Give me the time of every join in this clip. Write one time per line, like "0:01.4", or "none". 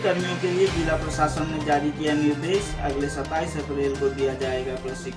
none